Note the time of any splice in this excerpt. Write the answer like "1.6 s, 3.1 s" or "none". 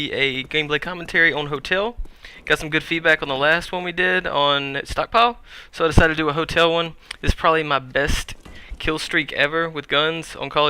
7.8 s

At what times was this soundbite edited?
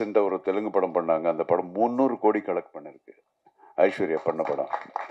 none

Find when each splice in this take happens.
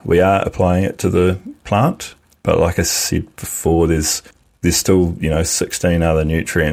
none

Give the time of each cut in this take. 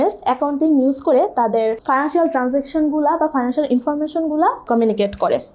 1.8 s, 4.6 s

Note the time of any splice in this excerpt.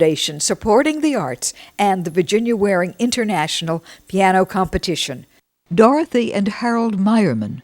5.5 s

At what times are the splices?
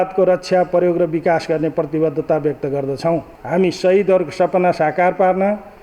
3.3 s

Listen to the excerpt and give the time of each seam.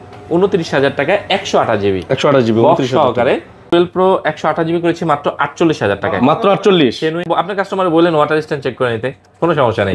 3.7 s, 7.3 s

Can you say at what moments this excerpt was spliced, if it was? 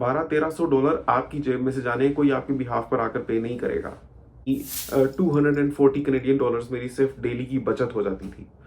4.5 s

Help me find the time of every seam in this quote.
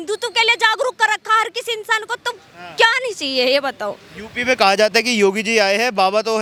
none

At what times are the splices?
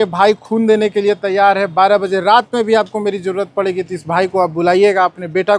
none

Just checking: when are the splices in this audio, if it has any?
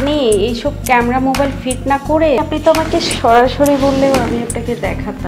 none

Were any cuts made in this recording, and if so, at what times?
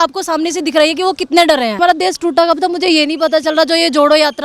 1.8 s

